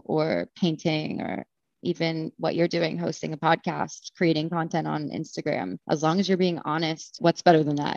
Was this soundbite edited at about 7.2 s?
yes; 2 cuts; at 5.8 s, 7.2 s

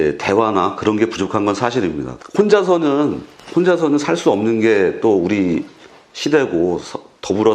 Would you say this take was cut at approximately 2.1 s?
yes; 1 cut; at 2.1 s

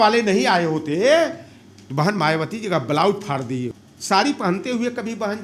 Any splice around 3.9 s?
yes; 1 cut; at 3.9 s

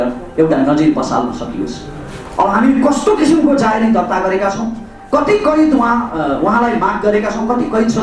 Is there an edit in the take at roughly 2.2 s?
no; 0 cuts

